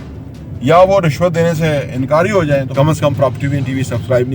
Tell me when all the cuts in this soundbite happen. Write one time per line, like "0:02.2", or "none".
0:02.7